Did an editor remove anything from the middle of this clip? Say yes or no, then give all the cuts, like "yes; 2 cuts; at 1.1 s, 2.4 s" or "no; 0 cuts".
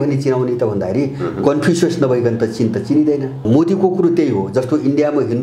yes; 1 cut; at 3.4 s